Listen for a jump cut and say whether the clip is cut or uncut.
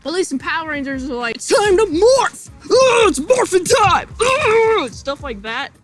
cut